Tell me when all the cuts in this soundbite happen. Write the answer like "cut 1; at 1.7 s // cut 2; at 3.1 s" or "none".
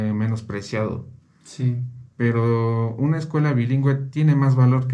none

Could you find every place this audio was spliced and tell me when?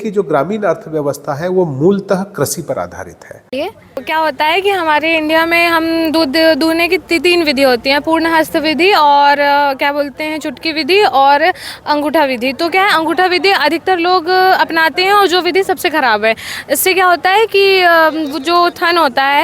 cut 1; at 3.5 s

